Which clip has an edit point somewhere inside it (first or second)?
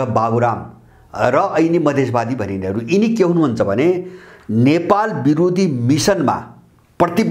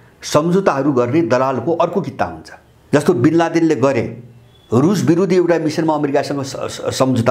second